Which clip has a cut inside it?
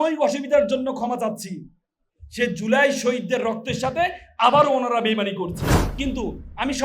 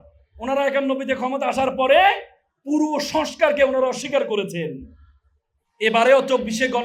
first; 1 cut; at 5.8 s

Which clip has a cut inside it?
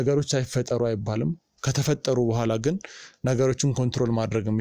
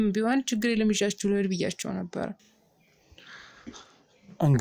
second; 1 cut; at 2.4 s

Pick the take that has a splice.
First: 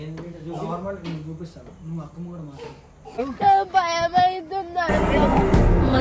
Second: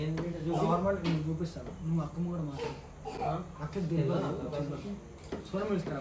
first; 1 cut; at 3.1 s

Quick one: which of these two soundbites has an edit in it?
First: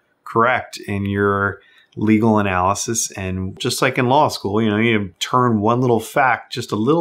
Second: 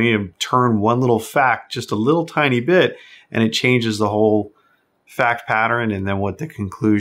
first; 1 cut; at 3.6 s

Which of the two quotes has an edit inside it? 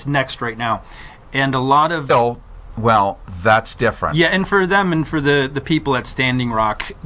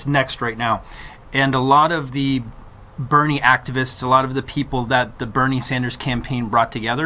second; 1 cut; at 2.0 s

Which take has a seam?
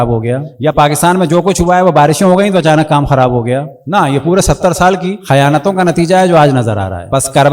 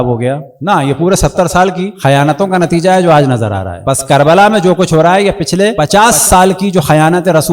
second; 1 cut; at 5.8 s

